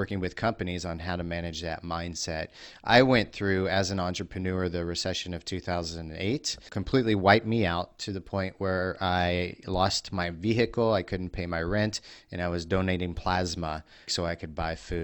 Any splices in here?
yes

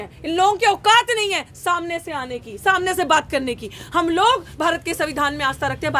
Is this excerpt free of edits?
yes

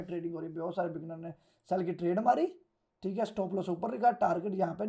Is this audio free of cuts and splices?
yes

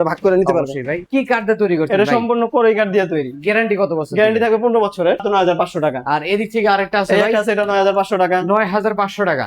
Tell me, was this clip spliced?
yes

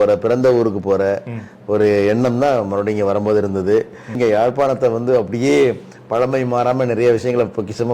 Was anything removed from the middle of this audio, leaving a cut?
yes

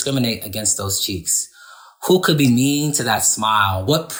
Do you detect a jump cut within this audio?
no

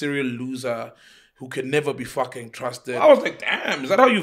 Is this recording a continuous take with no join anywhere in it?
no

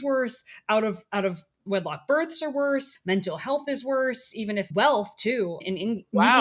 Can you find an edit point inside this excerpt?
yes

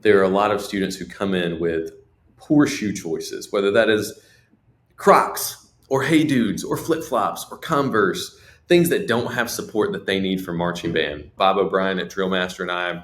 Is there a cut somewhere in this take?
yes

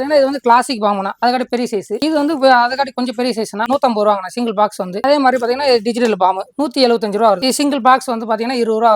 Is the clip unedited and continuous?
no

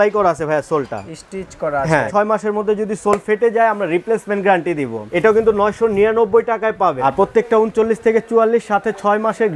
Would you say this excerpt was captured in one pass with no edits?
no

